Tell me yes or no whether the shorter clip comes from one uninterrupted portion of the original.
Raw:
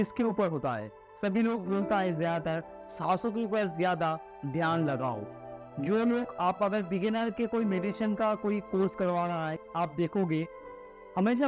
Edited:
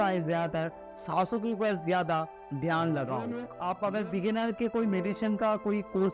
no